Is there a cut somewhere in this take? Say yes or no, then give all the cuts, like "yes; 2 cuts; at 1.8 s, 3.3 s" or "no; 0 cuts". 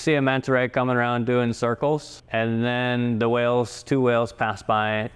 yes; 1 cut; at 2.2 s